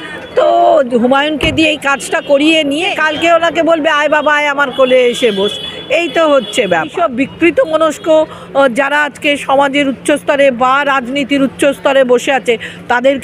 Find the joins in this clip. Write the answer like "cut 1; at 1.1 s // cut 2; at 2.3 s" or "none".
cut 1; at 3.0 s // cut 2; at 6.9 s